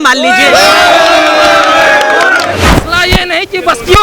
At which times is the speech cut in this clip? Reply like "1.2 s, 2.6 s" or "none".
2.5 s